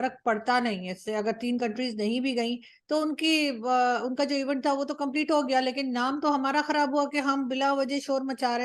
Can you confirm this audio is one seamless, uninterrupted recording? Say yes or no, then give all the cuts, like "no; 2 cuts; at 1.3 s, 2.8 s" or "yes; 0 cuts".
yes; 0 cuts